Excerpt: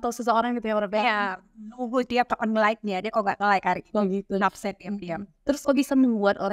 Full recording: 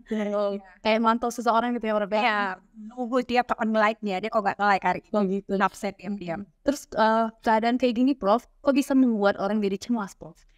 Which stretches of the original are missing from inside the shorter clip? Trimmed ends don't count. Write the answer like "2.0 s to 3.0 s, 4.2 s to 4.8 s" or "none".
6.8 s to 8.6 s